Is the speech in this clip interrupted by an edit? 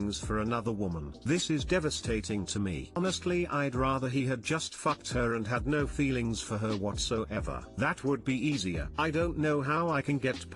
yes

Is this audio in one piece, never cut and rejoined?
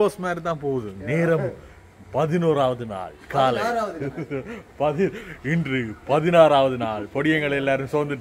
yes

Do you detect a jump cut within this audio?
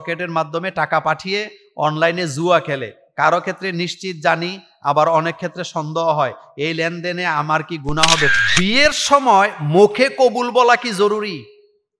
yes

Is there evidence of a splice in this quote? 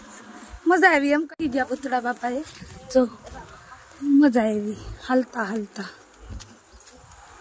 yes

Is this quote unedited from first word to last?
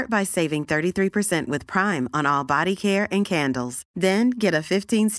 yes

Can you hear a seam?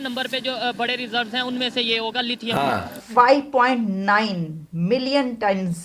yes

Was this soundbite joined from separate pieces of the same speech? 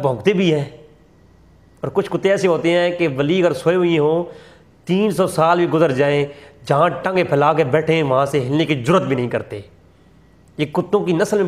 no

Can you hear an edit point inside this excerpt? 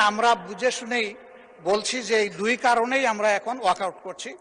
no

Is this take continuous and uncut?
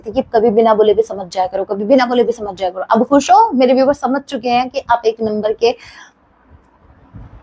yes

